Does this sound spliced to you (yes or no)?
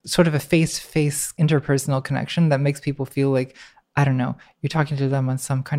yes